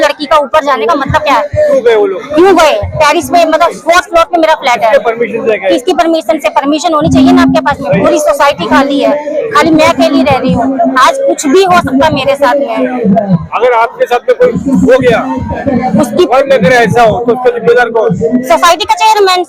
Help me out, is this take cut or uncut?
uncut